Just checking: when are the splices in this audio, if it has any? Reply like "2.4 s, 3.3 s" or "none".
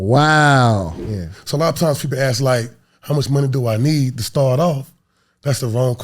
1.0 s